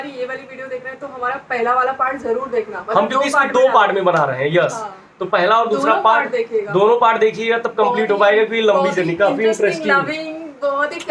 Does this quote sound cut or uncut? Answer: uncut